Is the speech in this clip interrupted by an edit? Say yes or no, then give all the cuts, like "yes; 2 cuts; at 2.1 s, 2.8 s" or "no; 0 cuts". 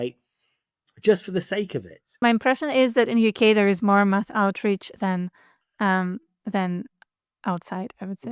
yes; 1 cut; at 2.0 s